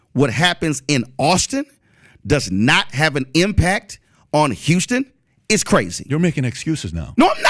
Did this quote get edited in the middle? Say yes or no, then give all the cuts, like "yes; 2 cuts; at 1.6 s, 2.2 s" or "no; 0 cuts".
no; 0 cuts